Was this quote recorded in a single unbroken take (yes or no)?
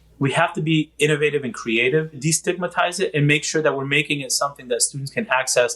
no